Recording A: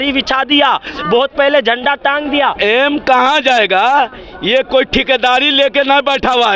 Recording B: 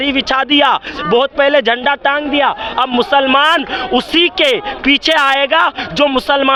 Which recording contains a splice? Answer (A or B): A